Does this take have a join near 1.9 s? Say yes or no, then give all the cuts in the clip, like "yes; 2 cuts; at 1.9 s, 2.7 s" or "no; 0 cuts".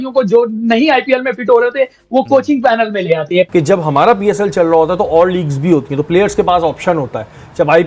no; 1 cut; at 3.5 s